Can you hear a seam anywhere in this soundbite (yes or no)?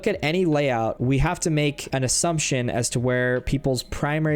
yes